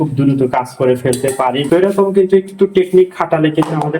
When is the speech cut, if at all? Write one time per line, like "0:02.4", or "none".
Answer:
0:01.6